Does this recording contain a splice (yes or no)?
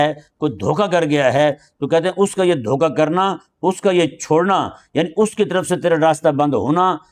no